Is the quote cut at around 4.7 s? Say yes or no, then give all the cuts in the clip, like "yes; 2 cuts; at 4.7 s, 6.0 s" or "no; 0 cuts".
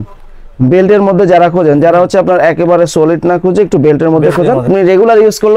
yes; 1 cut; at 4.7 s